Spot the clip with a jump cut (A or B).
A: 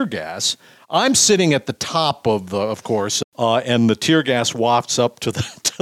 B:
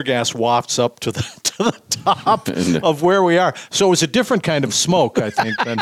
A